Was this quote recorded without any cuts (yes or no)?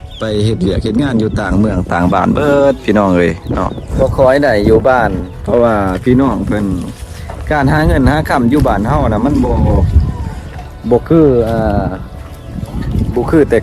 no